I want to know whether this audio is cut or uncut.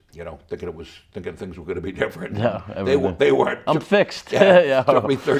uncut